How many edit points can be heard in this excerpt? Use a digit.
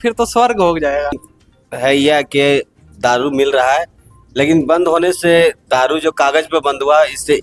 1